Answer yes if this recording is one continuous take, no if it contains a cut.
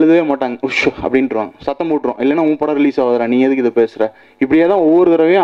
yes